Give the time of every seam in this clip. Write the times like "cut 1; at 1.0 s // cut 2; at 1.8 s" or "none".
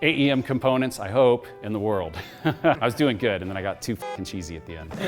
cut 1; at 2.8 s